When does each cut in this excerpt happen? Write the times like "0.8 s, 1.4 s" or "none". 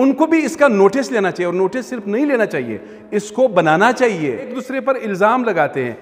4.6 s